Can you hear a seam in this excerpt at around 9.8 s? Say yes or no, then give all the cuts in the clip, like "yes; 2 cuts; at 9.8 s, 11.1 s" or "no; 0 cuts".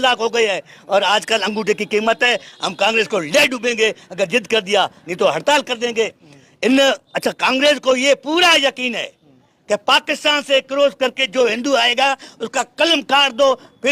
no; 1 cut; at 6.2 s